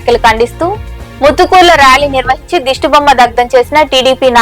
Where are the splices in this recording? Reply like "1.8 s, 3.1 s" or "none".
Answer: none